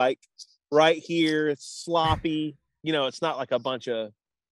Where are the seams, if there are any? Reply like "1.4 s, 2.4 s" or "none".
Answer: 2.7 s